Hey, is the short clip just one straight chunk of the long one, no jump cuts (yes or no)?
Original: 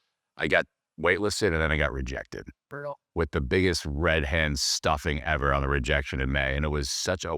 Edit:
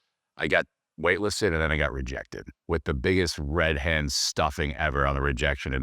no